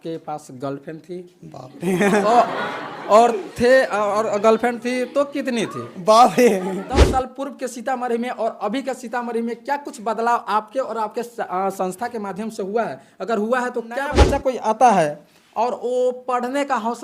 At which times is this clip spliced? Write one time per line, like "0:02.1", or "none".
0:07.0
0:14.2